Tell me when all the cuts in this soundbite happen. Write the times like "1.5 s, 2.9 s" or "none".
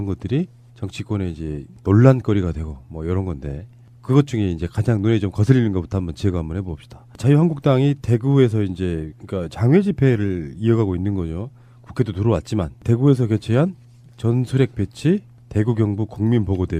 4.8 s